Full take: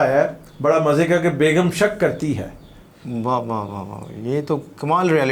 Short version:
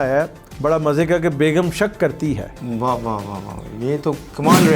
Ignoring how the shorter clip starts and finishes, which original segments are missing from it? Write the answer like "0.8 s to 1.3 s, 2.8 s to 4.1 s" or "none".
2.5 s to 3.0 s